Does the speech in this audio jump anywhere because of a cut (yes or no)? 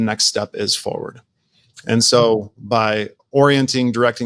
no